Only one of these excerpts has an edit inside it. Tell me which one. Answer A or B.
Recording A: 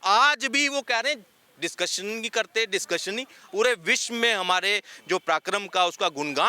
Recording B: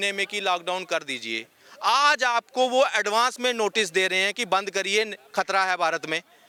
A